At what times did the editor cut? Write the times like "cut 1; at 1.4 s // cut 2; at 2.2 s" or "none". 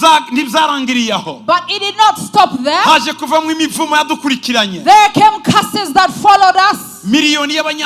none